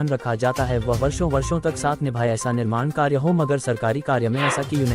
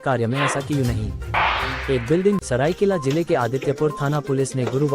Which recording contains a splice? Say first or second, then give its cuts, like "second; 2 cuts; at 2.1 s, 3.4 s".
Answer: second; 1 cut; at 2.4 s